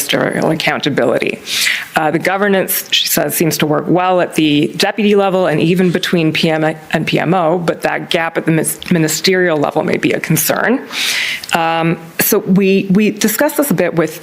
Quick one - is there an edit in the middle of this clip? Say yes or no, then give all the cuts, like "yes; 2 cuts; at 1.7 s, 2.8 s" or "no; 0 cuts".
yes; 1 cut; at 0.9 s